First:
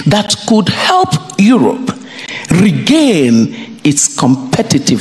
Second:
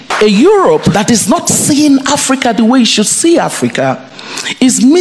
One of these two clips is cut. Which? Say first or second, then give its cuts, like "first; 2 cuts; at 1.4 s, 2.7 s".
second; 1 cut; at 0.9 s